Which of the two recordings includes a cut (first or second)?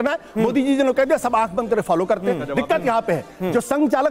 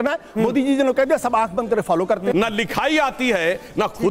second